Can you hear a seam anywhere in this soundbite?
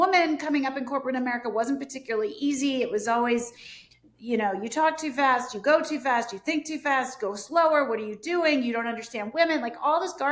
no; 0 cuts

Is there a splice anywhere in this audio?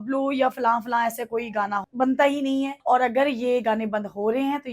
yes; 2 cuts; at 1.9 s, 2.8 s

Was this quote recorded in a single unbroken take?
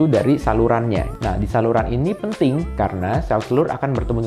no; 1 cut; at 1.1 s

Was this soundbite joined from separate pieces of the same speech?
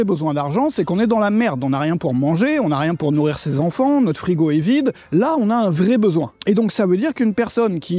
yes; 2 cuts; at 5.0 s, 6.3 s

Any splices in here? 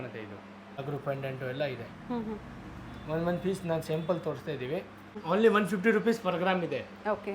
yes; 2 cuts; at 0.8 s, 5.1 s

